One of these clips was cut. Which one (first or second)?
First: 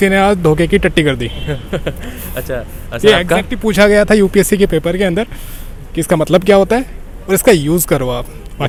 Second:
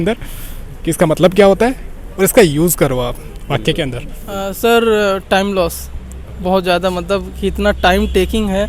second